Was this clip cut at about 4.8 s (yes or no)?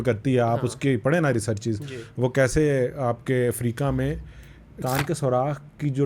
yes